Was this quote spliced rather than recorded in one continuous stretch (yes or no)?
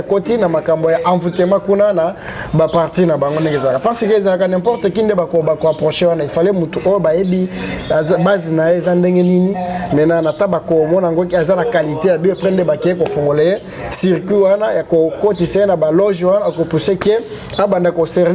no